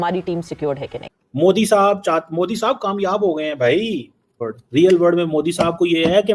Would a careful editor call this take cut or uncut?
cut